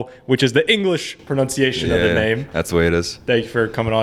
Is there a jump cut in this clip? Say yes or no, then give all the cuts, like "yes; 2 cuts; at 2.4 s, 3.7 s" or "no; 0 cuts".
no; 0 cuts